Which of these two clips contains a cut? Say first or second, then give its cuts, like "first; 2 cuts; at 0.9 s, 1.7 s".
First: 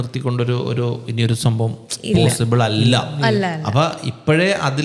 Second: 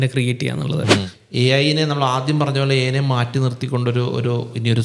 second; 1 cut; at 1.1 s